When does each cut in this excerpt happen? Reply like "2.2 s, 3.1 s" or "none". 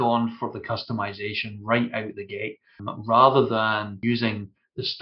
2.8 s, 4.0 s